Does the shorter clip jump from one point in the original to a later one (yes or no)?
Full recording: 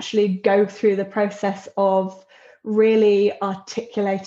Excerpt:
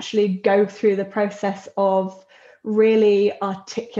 no